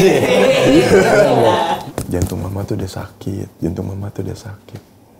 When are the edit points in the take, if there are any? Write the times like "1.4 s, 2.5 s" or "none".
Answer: 1.8 s